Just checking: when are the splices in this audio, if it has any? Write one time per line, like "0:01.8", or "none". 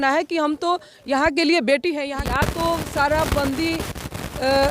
0:02.1